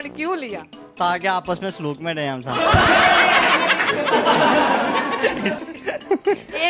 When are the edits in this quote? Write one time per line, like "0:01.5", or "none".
none